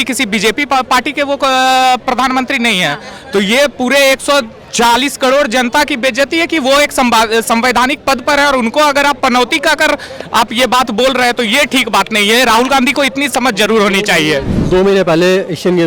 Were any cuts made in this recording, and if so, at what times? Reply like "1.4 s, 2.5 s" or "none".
none